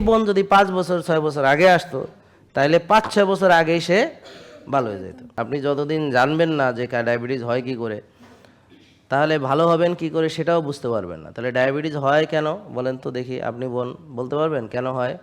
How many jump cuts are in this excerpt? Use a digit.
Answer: 1